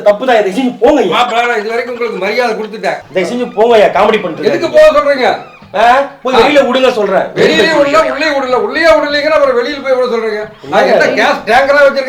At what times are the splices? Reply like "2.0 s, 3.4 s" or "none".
3.0 s